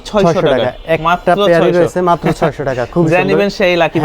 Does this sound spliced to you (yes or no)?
no